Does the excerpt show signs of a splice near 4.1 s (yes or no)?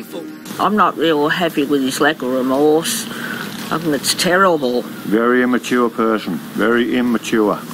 yes